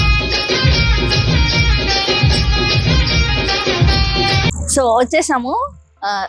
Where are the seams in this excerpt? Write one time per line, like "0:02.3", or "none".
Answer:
0:04.5